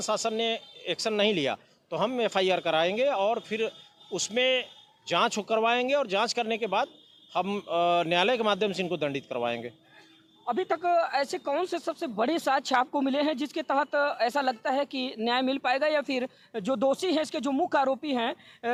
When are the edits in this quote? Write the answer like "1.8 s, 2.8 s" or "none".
none